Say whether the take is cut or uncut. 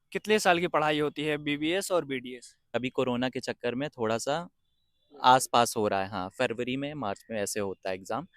cut